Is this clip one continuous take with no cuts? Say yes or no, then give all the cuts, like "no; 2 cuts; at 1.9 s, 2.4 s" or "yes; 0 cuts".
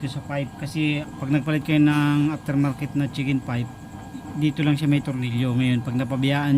no; 1 cut; at 1.1 s